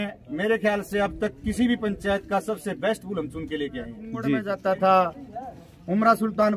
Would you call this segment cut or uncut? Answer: cut